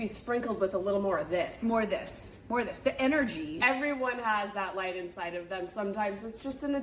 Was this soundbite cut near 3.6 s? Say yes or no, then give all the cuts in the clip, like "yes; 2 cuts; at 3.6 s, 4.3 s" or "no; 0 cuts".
yes; 1 cut; at 3.6 s